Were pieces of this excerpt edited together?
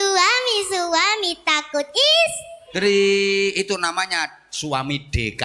no; 0 cuts

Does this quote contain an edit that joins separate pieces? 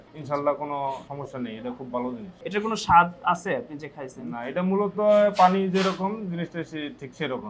yes; 2 cuts; at 1.1 s, 2.3 s

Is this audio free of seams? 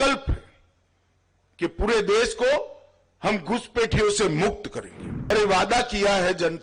no; 1 cut; at 5.3 s

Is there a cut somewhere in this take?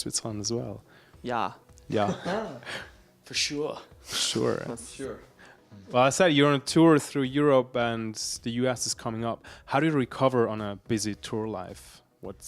yes; 1 cut; at 9.2 s

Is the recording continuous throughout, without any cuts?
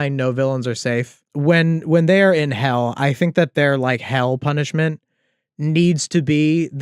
no; 1 cut; at 1.2 s

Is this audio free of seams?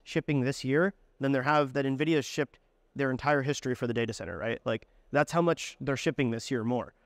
yes; 0 cuts

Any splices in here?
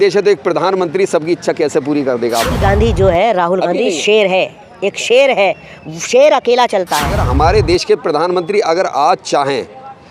yes; 2 cuts; at 2.6 s, 7.2 s

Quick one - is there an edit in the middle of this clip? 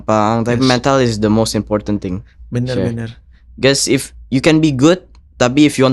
no; 0 cuts

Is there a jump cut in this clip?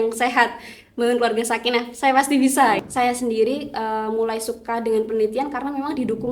yes; 1 cut; at 2.8 s

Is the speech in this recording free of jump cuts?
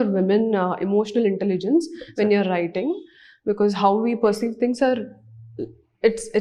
yes; 0 cuts

